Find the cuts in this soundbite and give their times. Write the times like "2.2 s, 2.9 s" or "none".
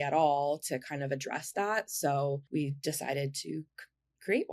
2.4 s